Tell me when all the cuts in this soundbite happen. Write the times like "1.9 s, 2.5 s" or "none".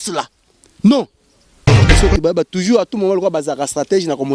2.0 s